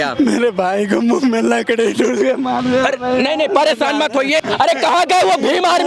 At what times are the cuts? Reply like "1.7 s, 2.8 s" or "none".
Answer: 4.4 s